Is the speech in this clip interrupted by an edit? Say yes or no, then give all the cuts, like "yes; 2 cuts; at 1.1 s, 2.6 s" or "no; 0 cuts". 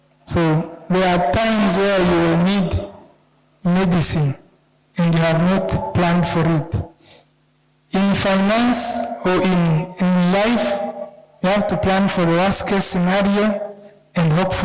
no; 0 cuts